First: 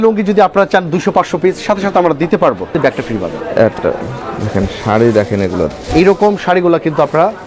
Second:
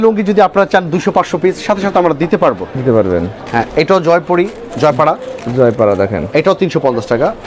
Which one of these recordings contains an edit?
first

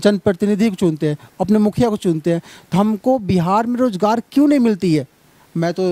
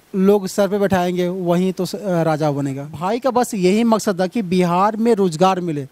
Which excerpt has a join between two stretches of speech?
second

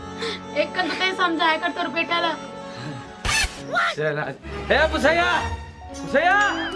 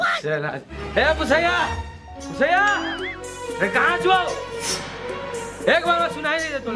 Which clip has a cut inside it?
first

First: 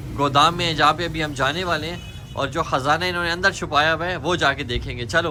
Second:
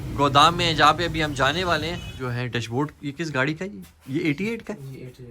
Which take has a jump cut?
second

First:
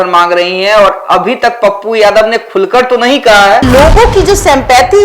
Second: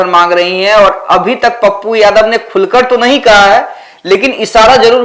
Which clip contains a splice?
first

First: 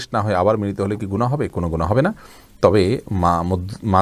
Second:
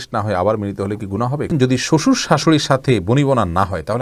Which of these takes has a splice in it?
second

